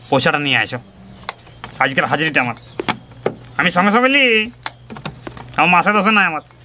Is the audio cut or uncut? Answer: uncut